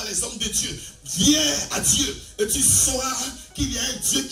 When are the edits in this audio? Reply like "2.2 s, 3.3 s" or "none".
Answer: none